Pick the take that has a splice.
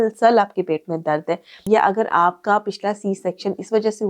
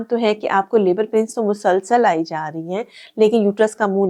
first; 1 cut; at 1.7 s

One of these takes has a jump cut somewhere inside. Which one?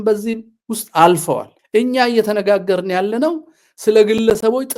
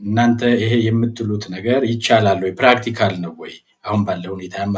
first; 1 cut; at 1.5 s

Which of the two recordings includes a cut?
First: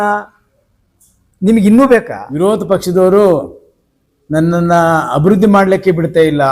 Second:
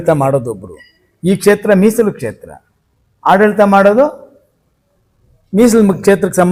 first; 1 cut; at 2.4 s

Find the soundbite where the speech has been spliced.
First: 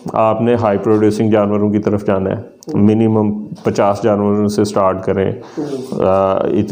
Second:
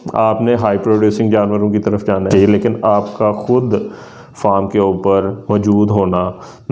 second; 1 cut; at 2.3 s

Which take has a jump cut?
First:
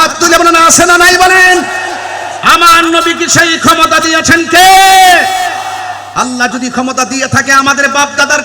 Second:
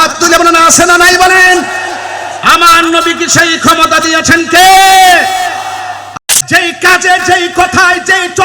second; 1 cut; at 6.1 s

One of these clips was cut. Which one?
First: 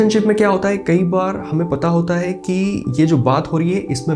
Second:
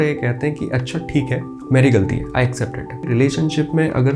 second; 2 cuts; at 1.5 s, 3.1 s

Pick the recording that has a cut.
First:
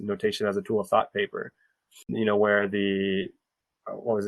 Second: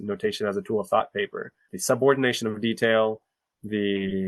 second; 1 cut; at 1.7 s

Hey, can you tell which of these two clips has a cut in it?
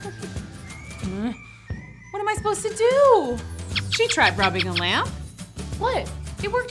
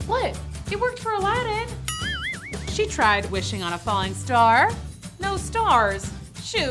second; 1 cut; at 2.5 s

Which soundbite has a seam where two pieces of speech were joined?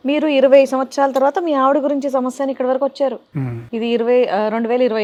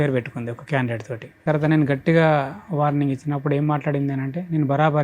second; 1 cut; at 1.4 s

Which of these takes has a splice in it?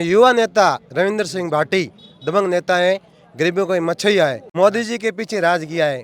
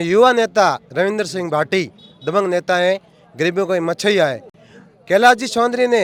first; 1 cut; at 4.4 s

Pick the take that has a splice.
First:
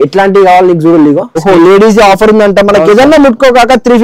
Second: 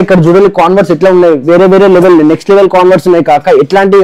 first; 1 cut; at 1.4 s

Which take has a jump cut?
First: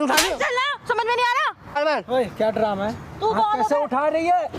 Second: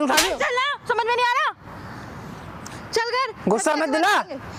first; 1 cut; at 1.8 s

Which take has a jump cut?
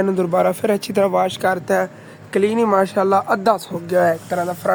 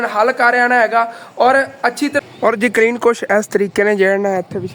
second; 1 cut; at 2.2 s

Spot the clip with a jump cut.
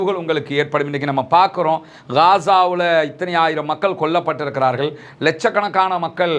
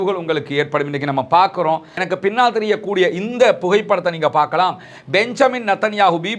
second; 1 cut; at 2.1 s

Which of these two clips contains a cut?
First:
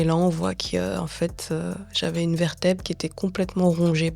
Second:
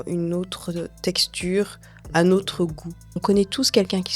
second; 1 cut; at 3.2 s

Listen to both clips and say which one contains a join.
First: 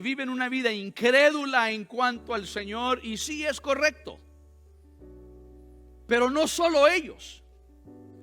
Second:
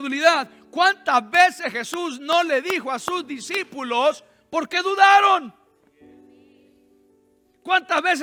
first; 2 cuts; at 4.2 s, 5.7 s

